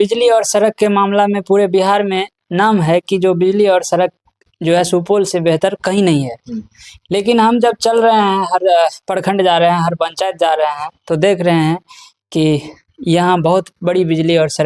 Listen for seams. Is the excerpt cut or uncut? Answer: uncut